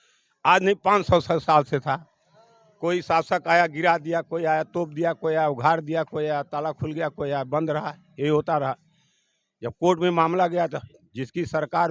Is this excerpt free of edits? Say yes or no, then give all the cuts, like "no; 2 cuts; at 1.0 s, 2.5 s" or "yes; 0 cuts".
yes; 0 cuts